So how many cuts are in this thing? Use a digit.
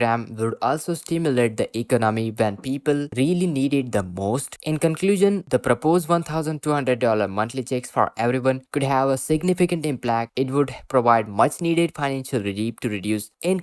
0